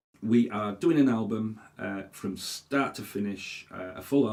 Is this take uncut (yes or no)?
yes